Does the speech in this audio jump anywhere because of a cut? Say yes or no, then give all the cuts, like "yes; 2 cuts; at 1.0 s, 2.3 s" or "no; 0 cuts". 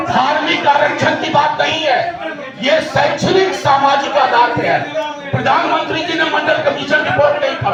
no; 0 cuts